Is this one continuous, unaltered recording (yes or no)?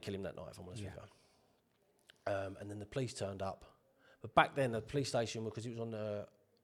yes